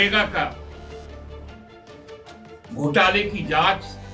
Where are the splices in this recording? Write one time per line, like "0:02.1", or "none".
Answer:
none